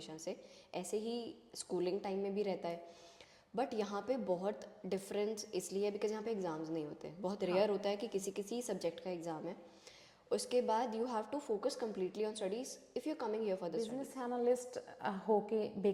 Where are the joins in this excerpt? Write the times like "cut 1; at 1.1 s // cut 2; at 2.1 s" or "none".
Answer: cut 1; at 14.0 s